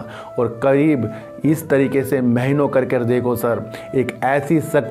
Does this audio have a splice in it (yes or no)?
no